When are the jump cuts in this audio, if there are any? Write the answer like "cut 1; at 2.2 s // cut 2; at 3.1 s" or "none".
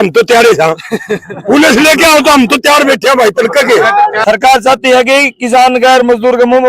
cut 1; at 4.2 s